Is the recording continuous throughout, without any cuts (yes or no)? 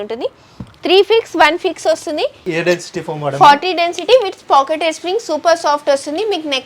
no